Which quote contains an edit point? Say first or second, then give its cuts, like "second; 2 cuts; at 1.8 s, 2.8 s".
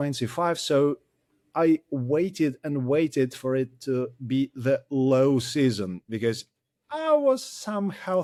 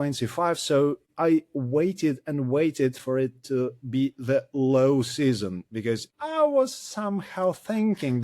second; 2 cuts; at 1.1 s, 6.1 s